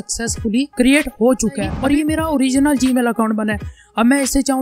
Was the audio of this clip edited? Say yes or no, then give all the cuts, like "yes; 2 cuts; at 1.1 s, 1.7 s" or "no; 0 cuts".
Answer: yes; 1 cut; at 1.7 s